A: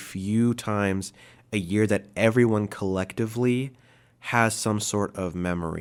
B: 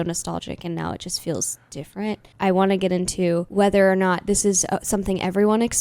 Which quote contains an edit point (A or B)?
B